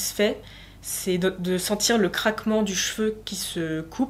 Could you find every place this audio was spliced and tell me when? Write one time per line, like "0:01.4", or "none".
none

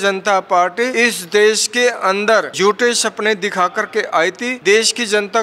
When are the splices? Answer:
0:00.9
0:02.5
0:04.5

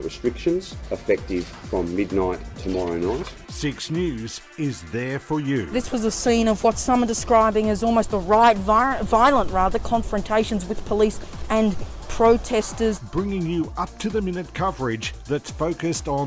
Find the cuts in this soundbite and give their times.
none

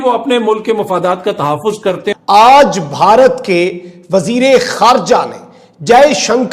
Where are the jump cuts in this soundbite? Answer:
0:02.2

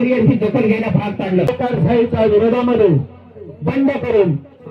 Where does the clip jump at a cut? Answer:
0:01.5

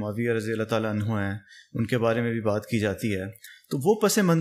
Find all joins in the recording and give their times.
none

